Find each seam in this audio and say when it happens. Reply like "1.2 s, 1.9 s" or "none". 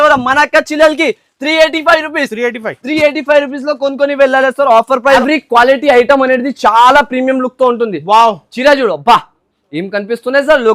5.2 s